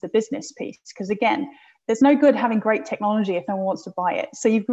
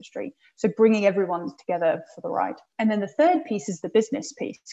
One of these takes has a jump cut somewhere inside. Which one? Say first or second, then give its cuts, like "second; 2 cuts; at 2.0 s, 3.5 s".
second; 1 cut; at 2.7 s